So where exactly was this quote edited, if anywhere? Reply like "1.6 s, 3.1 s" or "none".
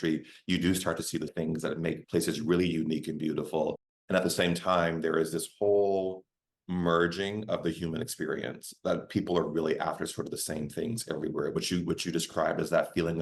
1.3 s